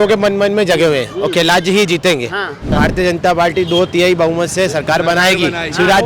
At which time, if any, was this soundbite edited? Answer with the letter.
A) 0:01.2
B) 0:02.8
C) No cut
B